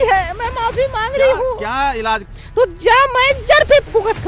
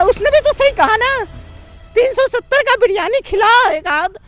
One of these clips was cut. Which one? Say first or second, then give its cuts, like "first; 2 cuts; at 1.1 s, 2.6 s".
first; 1 cut; at 2.3 s